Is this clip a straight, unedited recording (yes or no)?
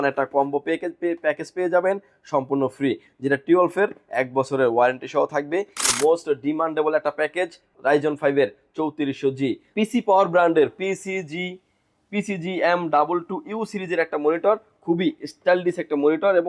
no